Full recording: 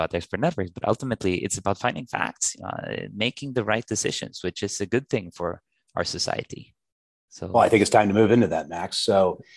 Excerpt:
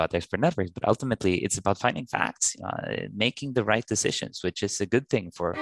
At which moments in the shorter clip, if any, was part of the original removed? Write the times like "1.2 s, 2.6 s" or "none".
none